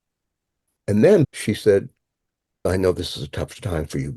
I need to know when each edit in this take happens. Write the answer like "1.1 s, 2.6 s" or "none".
1.2 s, 2.7 s